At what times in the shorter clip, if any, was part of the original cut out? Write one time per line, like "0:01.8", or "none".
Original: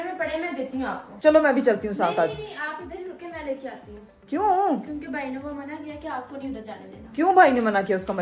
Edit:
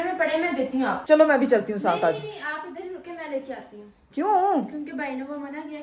0:01.0